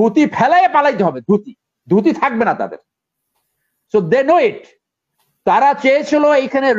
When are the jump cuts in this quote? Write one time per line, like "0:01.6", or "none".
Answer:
none